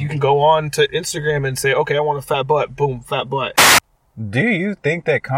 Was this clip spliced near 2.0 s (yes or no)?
no